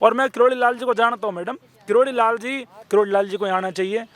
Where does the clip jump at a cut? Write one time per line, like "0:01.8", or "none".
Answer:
0:02.7